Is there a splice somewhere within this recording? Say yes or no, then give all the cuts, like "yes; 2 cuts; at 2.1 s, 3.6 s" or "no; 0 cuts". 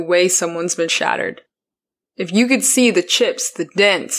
no; 0 cuts